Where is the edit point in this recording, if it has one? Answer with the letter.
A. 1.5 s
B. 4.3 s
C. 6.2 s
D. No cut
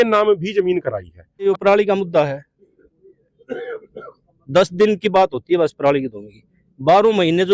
A